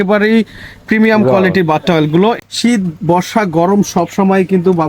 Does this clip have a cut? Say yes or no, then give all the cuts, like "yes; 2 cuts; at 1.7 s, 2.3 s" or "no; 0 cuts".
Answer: yes; 1 cut; at 2.4 s